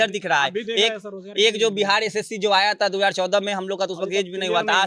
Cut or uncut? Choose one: uncut